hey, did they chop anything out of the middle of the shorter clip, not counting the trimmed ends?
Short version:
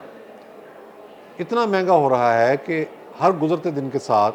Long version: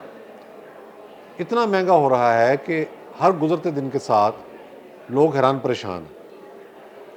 no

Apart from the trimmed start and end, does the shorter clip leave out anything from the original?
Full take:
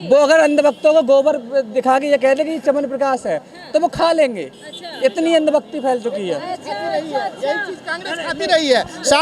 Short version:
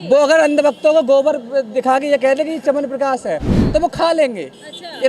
no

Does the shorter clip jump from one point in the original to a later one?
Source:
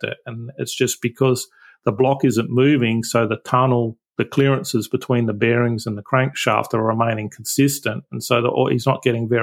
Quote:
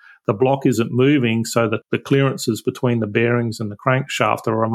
yes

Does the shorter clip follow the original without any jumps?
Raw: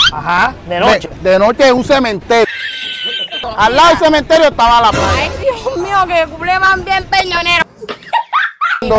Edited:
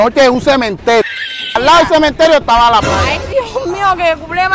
no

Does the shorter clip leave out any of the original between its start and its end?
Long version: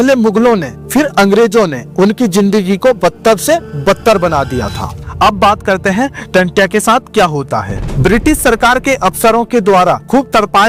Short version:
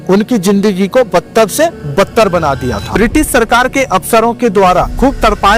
yes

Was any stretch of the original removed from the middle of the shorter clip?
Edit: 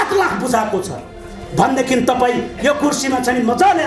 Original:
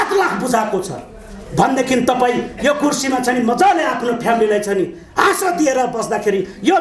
no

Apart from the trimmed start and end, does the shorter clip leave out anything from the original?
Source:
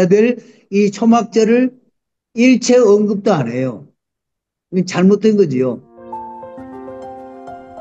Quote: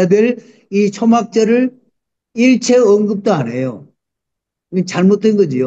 no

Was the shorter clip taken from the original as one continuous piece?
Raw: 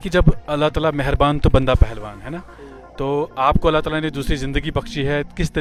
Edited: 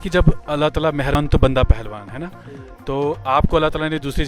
no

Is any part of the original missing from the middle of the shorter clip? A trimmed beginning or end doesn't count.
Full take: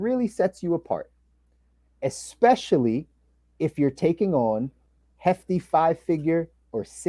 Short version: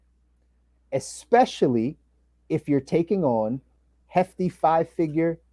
no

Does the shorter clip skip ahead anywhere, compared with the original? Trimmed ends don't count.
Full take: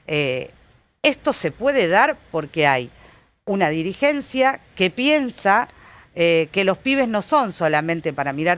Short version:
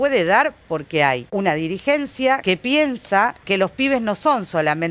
yes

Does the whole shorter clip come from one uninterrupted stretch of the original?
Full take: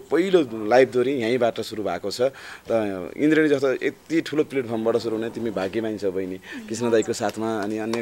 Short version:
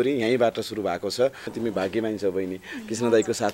no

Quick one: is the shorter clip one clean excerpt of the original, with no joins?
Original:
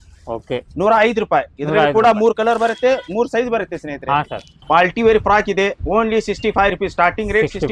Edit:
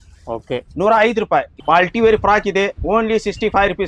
no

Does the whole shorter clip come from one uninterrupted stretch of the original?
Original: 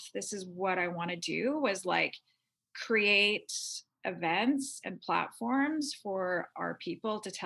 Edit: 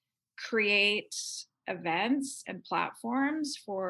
yes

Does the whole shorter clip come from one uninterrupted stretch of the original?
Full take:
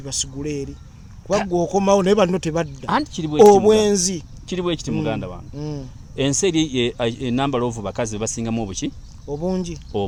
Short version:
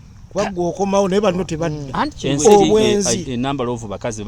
no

